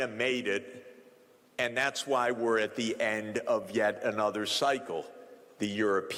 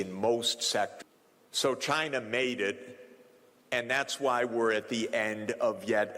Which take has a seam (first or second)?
second